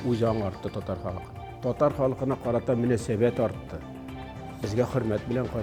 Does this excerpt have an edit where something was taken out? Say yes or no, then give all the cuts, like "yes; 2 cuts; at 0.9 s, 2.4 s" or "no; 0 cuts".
no; 0 cuts